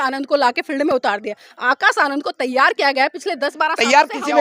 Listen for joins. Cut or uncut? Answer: uncut